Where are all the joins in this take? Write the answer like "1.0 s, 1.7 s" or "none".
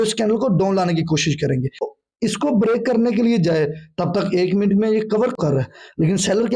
1.9 s, 5.4 s